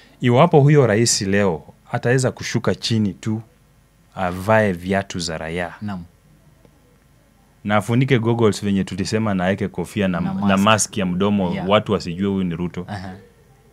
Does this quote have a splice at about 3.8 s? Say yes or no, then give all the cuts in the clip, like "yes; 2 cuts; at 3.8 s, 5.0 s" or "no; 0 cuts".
no; 0 cuts